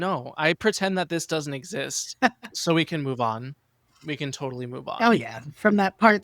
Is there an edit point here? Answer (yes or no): yes